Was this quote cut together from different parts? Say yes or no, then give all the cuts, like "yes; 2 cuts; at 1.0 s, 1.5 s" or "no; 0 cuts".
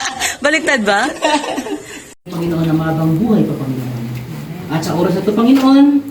yes; 1 cut; at 2.0 s